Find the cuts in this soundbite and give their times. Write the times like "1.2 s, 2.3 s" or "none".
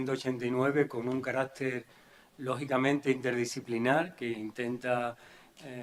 none

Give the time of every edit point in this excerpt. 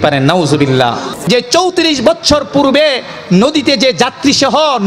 1.1 s

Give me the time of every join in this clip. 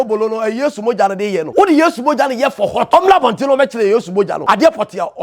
1.5 s, 2.9 s, 4.4 s

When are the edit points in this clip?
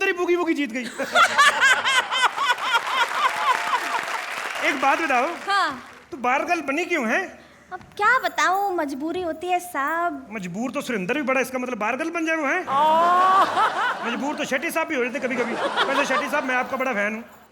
none

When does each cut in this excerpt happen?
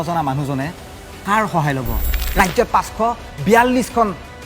2.2 s

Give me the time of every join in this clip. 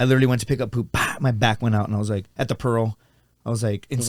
none

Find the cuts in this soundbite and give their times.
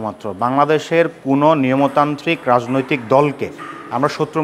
none

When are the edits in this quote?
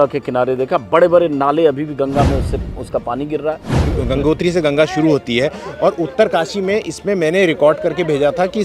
3.9 s

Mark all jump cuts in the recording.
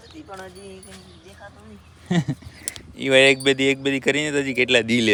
none

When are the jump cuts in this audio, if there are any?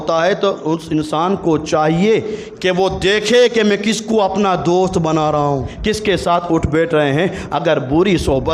5.7 s

